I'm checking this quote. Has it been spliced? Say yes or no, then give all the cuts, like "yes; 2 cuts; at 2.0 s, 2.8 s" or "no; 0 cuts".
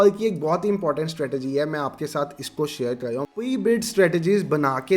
yes; 1 cut; at 3.3 s